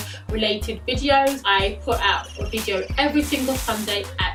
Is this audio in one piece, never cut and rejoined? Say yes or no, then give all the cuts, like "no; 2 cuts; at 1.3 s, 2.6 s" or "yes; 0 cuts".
yes; 0 cuts